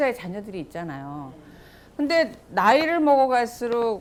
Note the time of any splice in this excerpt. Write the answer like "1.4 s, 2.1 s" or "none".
none